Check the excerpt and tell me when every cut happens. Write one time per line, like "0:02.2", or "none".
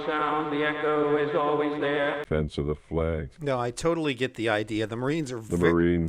0:02.2